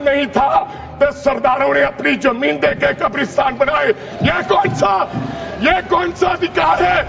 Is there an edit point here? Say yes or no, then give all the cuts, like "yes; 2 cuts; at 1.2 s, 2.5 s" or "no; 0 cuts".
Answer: no; 0 cuts